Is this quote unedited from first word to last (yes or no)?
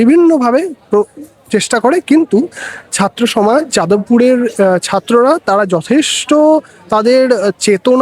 yes